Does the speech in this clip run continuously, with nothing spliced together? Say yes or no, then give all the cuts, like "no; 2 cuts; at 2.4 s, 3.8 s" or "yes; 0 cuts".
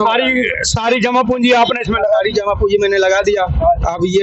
yes; 0 cuts